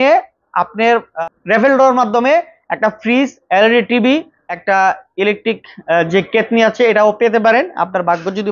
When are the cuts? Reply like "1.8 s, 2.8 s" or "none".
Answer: 1.1 s, 4.7 s